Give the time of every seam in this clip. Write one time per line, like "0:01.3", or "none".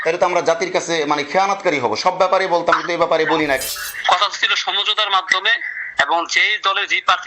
0:03.7